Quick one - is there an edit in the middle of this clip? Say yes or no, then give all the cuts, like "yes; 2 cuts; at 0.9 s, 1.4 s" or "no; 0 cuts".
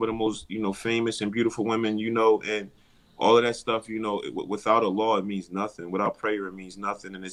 no; 0 cuts